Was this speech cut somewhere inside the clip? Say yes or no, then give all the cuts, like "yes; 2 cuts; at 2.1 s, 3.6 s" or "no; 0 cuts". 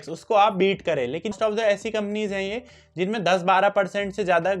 yes; 1 cut; at 1.3 s